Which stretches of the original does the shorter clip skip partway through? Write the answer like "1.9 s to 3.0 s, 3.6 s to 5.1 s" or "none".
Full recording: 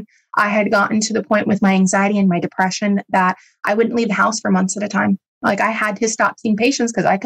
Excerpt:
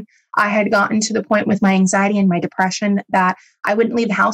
none